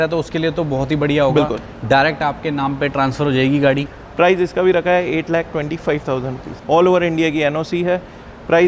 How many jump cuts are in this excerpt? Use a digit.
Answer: 2